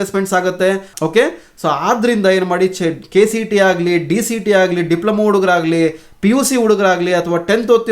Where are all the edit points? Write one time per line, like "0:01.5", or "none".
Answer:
0:00.9